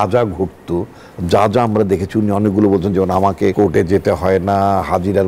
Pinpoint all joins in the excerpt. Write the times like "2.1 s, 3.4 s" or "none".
3.5 s